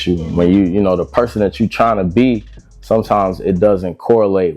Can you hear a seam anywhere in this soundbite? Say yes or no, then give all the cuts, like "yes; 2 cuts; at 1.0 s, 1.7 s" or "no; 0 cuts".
no; 0 cuts